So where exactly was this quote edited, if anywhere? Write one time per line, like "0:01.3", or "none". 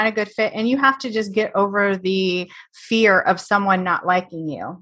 none